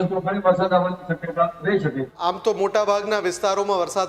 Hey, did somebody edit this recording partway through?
yes; 1 cut; at 2.1 s

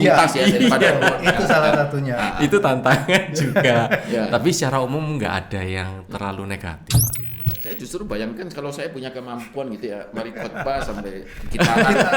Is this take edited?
yes; 1 cut; at 7.2 s

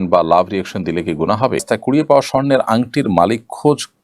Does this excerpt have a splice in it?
yes; 1 cut; at 1.6 s

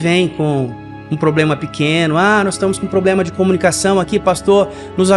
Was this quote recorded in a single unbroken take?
yes; 0 cuts

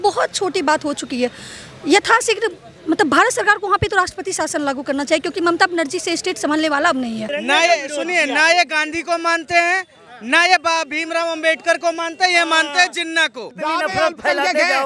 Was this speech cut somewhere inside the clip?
yes; 2 cuts; at 7.3 s, 13.4 s

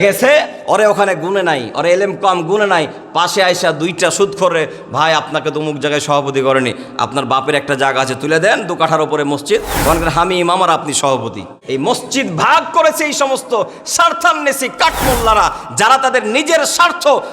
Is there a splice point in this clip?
yes; 1 cut; at 11.0 s

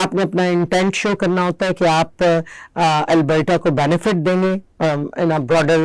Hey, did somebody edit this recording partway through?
no; 0 cuts

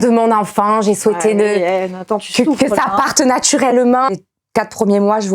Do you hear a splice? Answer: yes; 1 cut; at 4.1 s

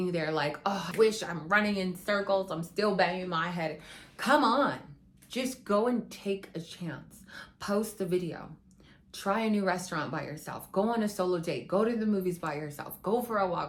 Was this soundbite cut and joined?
no; 0 cuts

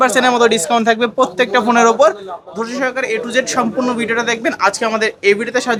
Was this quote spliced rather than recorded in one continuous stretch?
no; 0 cuts

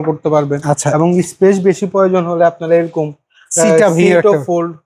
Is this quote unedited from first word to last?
yes; 0 cuts

